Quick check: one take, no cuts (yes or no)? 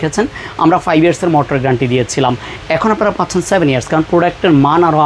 yes